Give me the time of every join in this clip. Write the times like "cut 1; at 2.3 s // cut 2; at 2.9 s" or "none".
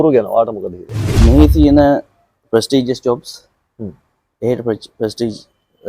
cut 1; at 1.1 s